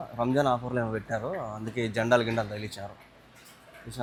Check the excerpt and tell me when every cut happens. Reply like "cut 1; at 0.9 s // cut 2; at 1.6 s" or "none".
none